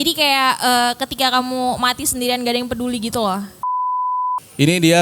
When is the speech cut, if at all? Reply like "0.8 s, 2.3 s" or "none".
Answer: 3.9 s